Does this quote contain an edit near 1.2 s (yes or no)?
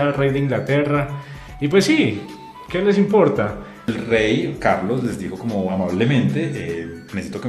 no